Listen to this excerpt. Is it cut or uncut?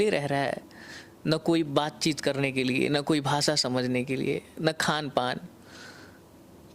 uncut